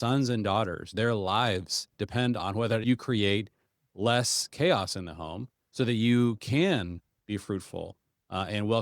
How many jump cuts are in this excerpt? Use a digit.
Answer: 1